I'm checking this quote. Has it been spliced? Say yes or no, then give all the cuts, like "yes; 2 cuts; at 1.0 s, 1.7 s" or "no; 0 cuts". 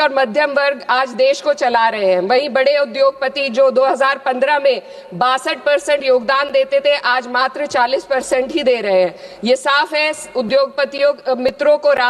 no; 0 cuts